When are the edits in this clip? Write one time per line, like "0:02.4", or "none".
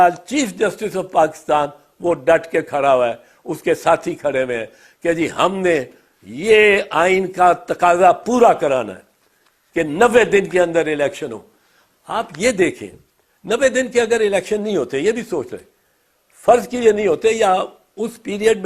none